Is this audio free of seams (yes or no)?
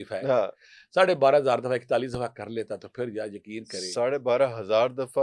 yes